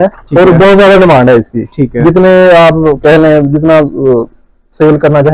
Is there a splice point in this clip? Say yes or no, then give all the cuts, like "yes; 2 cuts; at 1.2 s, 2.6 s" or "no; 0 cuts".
no; 0 cuts